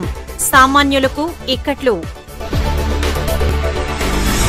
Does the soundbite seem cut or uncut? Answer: cut